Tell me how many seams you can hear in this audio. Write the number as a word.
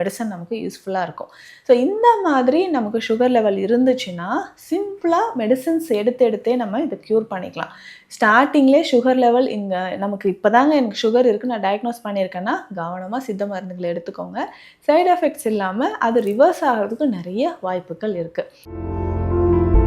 one